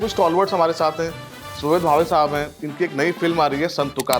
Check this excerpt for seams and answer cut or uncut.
uncut